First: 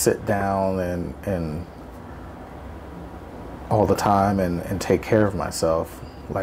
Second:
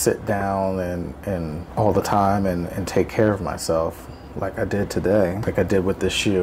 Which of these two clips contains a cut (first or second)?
second